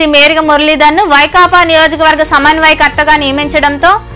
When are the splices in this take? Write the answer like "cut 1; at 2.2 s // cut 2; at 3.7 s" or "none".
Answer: none